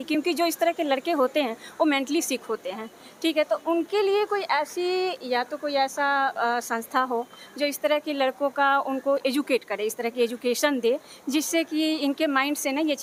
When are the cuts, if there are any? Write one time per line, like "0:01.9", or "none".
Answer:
none